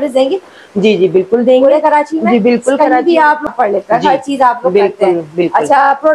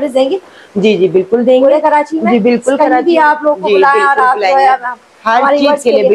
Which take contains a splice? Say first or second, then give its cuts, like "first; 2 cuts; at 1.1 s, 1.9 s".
first; 1 cut; at 3.5 s